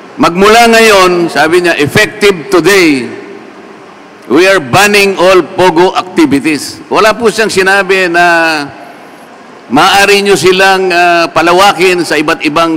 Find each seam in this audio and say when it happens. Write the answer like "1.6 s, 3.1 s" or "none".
none